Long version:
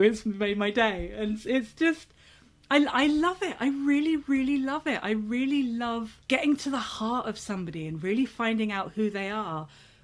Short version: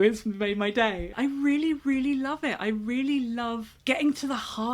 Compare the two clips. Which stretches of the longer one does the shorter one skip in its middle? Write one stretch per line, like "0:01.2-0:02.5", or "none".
0:01.1-0:03.5